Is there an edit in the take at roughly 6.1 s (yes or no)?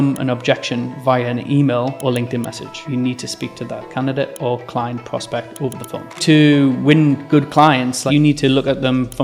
yes